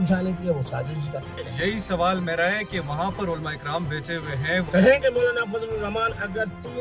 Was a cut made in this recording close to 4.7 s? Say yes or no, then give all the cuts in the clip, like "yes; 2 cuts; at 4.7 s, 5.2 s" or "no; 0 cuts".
yes; 2 cuts; at 1.4 s, 4.7 s